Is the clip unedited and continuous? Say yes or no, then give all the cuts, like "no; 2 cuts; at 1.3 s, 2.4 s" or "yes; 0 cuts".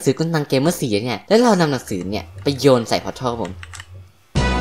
no; 1 cut; at 1.1 s